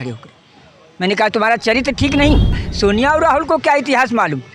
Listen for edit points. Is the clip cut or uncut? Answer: cut